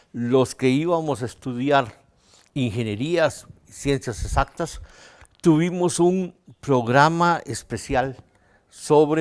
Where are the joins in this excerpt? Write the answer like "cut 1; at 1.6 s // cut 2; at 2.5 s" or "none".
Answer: cut 1; at 1.6 s